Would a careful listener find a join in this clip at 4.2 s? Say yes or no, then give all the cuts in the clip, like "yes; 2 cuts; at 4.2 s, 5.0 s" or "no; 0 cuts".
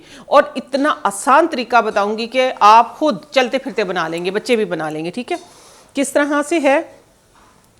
no; 0 cuts